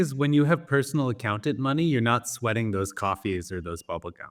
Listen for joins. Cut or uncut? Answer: uncut